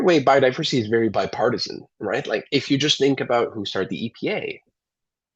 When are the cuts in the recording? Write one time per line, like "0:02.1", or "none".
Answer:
0:01.1

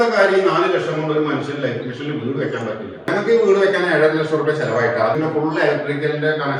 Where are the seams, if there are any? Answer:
0:03.1
0:05.1

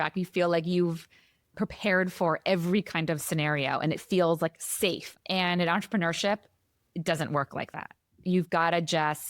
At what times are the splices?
0:05.0

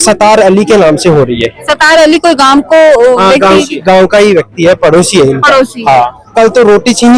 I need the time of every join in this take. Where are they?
0:06.2

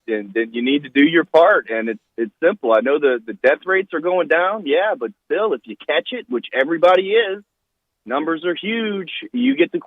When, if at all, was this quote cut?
0:06.6

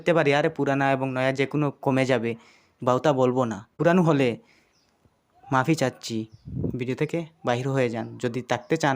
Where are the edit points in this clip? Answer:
0:03.7

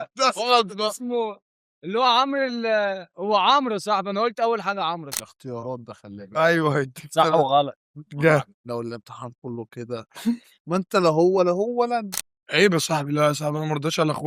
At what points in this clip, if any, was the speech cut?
0:05.1
0:10.5
0:12.2

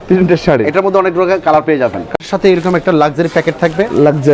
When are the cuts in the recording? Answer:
0:02.1

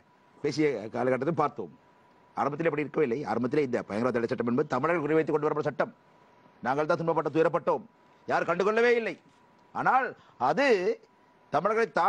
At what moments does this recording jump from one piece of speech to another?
none

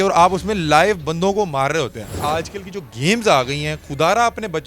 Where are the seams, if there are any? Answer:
0:02.1

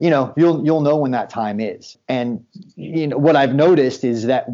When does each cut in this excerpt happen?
0:02.0

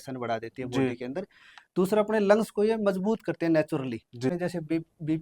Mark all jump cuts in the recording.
0:04.3

